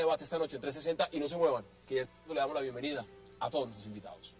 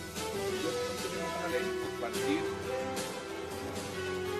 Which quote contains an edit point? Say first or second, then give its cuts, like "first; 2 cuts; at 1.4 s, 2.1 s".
first; 1 cut; at 1.5 s